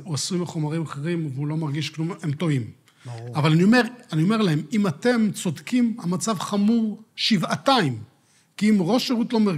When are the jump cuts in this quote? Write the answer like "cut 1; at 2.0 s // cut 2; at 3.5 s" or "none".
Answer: none